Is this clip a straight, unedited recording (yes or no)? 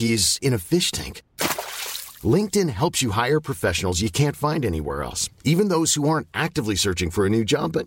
yes